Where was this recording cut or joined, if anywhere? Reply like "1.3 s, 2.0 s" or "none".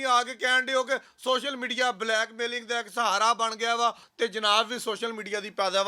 4.1 s